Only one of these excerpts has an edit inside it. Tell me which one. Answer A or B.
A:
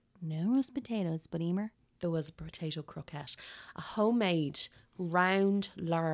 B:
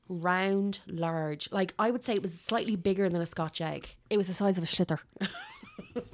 A